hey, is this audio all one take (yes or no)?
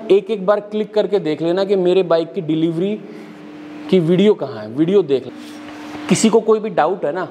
no